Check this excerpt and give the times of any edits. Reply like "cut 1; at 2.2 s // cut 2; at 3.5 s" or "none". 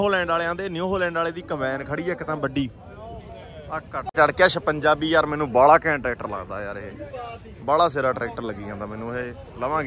cut 1; at 4.1 s